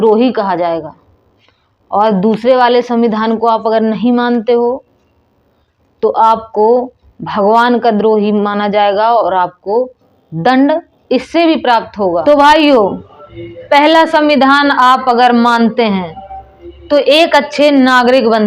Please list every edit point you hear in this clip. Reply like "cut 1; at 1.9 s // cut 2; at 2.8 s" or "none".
cut 1; at 12.2 s

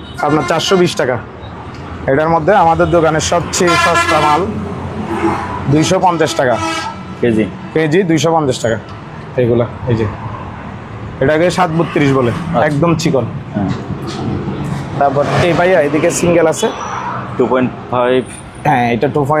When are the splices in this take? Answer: none

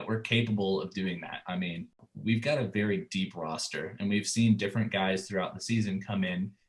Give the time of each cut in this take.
cut 1; at 2.1 s

